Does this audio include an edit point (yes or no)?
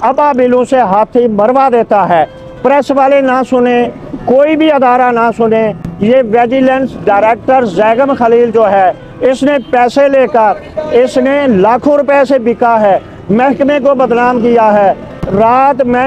no